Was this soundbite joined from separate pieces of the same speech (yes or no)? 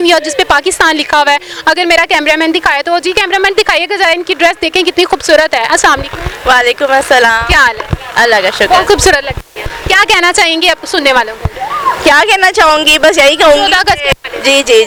no